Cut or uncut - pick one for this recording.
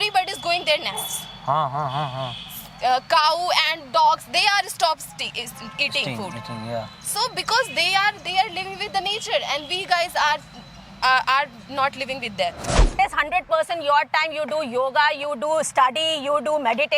cut